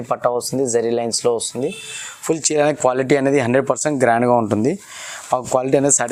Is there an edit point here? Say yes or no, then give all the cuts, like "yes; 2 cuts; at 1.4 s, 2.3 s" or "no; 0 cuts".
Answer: no; 0 cuts